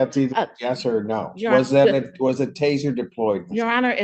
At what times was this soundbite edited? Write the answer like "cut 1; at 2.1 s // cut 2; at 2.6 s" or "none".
none